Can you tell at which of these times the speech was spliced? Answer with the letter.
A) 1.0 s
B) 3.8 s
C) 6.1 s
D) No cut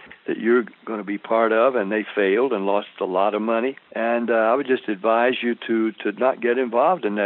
B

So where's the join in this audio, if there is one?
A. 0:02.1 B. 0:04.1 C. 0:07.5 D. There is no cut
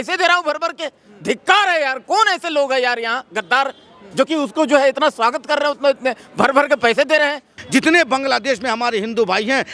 C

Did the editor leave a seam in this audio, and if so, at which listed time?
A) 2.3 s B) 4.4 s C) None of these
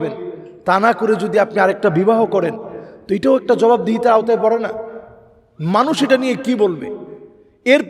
C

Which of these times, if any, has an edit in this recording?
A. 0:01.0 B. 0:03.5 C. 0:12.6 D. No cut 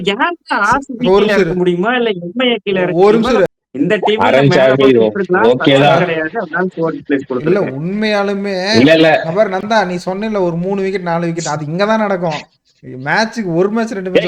B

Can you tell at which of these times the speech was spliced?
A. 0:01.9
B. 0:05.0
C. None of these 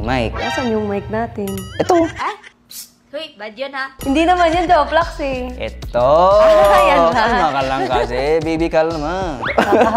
C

